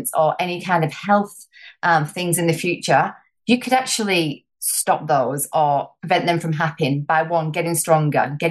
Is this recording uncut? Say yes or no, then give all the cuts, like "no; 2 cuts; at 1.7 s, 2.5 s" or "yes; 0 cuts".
yes; 0 cuts